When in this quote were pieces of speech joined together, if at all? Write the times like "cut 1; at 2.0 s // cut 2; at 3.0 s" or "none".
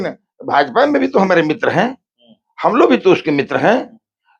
none